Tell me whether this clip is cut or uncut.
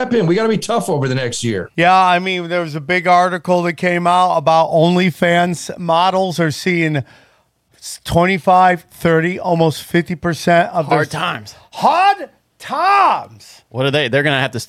cut